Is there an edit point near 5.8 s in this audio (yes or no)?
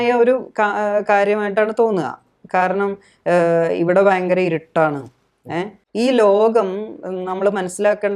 yes